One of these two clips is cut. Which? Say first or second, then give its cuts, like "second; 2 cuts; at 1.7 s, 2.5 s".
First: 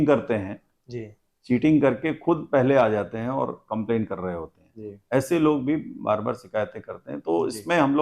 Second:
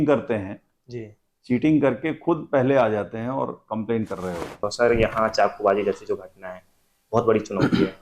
second; 1 cut; at 4.7 s